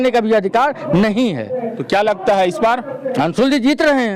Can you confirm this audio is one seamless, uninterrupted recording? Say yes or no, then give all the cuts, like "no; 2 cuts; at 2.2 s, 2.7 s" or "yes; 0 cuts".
yes; 0 cuts